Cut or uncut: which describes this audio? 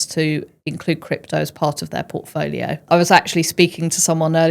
cut